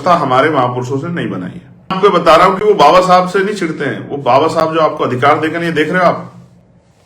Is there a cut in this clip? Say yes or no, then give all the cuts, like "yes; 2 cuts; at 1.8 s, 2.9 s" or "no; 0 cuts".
yes; 1 cut; at 2.0 s